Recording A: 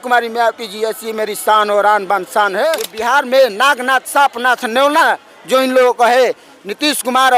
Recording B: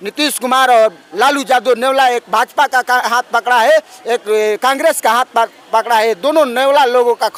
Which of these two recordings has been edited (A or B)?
A